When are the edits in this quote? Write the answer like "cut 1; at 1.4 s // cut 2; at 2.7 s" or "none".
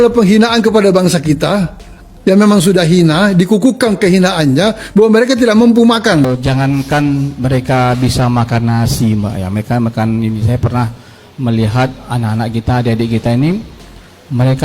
cut 1; at 6.3 s